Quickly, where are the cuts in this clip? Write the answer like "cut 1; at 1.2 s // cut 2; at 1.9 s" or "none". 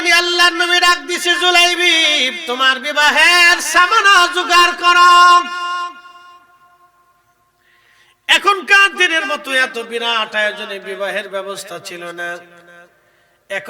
none